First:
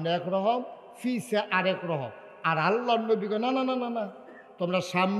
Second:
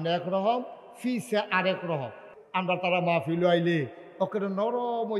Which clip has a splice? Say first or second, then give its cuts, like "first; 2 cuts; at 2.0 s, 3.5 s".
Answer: second; 1 cut; at 2.3 s